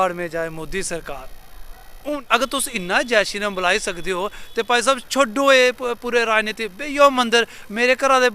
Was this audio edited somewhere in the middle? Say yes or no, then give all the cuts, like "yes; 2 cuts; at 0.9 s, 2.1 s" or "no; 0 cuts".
yes; 1 cut; at 2.2 s